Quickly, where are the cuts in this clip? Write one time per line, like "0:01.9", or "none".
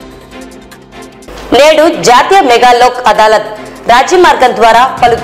0:01.0

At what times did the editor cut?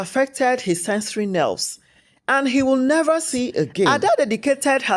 0:03.9

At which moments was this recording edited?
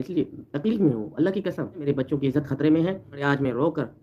0:01.9

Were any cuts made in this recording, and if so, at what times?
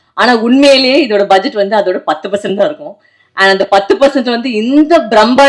none

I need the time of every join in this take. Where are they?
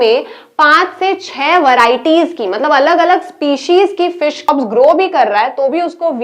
0:04.5

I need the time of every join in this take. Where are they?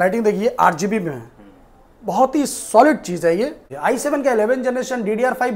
0:03.7

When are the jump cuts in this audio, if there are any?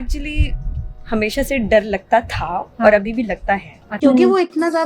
0:03.8

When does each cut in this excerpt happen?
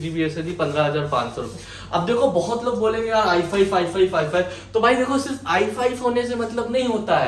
none

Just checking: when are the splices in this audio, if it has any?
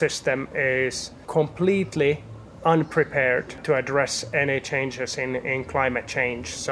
0:01.1
0:03.6

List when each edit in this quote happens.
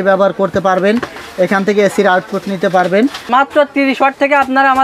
0:03.3

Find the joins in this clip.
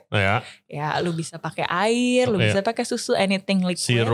none

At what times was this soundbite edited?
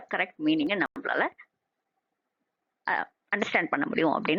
none

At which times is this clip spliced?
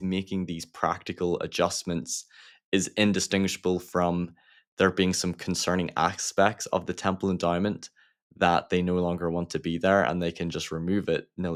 none

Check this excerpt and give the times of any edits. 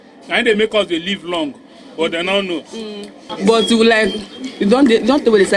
0:03.3

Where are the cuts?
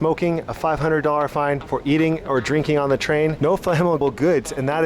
0:01.7
0:03.9

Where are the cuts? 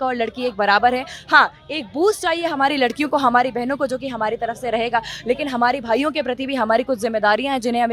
none

